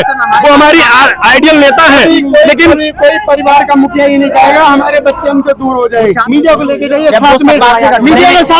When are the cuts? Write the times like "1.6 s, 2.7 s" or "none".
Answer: 6.2 s